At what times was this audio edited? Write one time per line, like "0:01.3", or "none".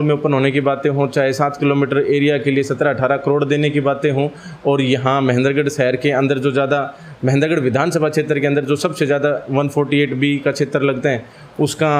none